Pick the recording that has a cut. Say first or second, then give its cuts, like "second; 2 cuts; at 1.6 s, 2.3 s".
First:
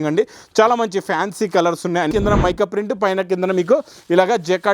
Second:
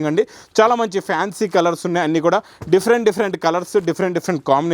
first; 1 cut; at 2.1 s